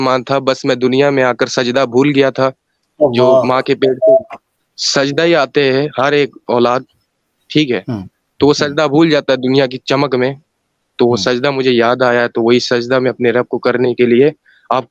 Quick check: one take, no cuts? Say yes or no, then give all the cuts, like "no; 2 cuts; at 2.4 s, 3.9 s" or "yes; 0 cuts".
yes; 0 cuts